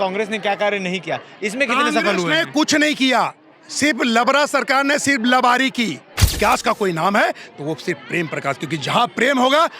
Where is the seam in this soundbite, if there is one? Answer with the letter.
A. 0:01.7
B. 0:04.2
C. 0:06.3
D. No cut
C